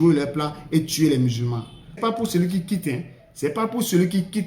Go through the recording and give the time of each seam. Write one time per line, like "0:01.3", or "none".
0:02.0